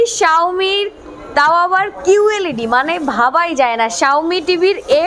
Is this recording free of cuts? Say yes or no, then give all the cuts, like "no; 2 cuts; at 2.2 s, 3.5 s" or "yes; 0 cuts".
yes; 0 cuts